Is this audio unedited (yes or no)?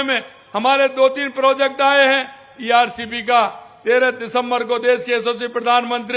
yes